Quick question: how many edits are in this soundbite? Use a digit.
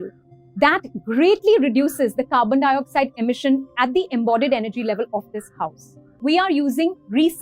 1